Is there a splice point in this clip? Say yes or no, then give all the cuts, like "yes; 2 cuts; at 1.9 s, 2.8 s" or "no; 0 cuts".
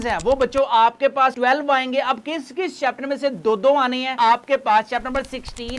yes; 1 cut; at 4.1 s